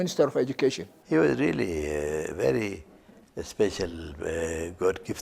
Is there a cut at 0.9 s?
yes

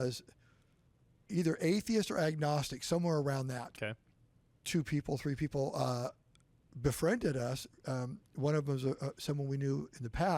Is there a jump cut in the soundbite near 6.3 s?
no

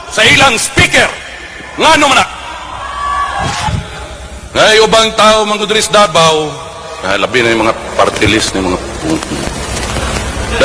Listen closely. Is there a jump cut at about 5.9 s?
no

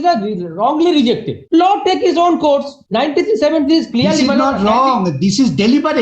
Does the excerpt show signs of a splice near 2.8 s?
yes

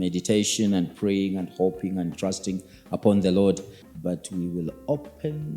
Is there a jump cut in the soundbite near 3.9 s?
yes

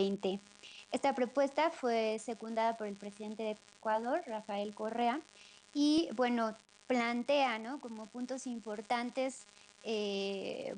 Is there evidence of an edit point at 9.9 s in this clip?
no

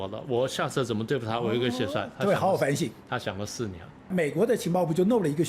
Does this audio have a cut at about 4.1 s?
yes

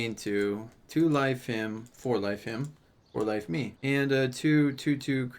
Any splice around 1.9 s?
no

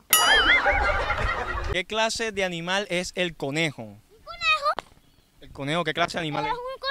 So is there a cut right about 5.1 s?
no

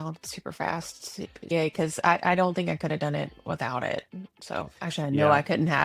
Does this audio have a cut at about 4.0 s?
no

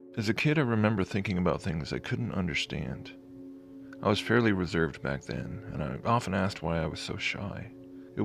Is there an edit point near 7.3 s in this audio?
no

